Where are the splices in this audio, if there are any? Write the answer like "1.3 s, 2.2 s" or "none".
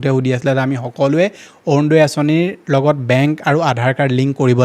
none

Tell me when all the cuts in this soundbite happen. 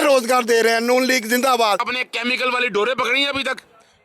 1.9 s

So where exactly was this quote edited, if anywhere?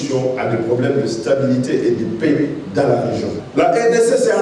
3.4 s

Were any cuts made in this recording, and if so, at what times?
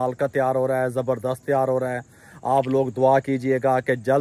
none

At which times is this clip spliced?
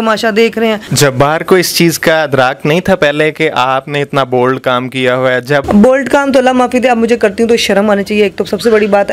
0.9 s, 5.6 s

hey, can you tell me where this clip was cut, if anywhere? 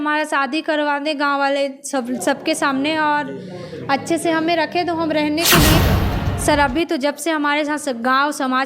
5.8 s

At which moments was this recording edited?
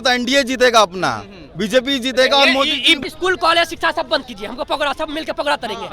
3.0 s

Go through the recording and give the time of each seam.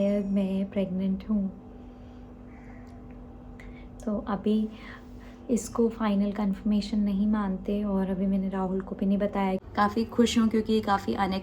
9.6 s

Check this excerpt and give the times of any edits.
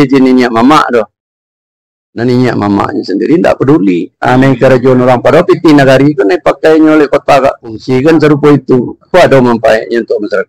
7.8 s

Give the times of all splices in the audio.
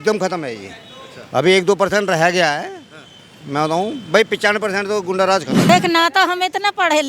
5.7 s

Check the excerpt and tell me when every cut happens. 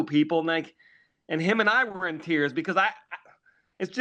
none

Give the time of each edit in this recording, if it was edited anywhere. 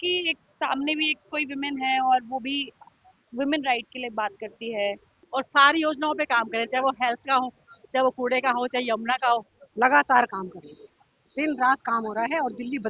5.1 s, 9.6 s

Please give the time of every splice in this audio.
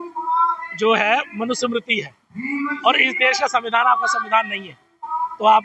none

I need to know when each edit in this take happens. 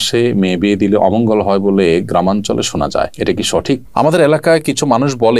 3.9 s

